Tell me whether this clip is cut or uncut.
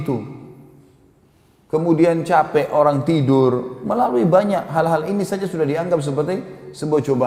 uncut